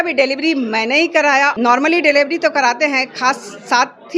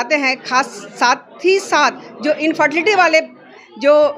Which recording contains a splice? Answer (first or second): first